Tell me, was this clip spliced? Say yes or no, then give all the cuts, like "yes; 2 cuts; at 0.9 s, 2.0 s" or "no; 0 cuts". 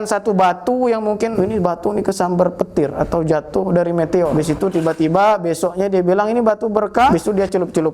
yes; 3 cuts; at 1.3 s, 4.3 s, 7.1 s